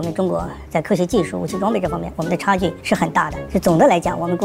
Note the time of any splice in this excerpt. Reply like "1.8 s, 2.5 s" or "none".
none

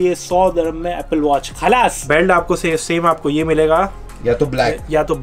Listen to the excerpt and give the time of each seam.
2.0 s

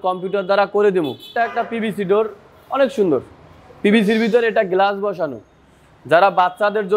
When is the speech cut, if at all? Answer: 1.3 s

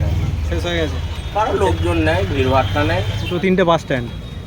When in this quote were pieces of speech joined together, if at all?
3.3 s

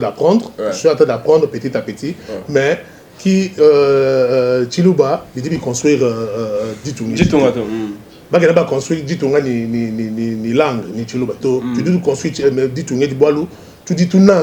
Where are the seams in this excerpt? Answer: none

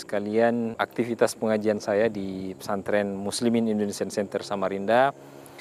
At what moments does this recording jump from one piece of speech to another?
none

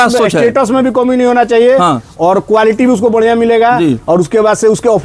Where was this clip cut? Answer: none

